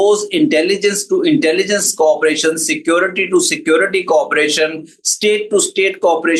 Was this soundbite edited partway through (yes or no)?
no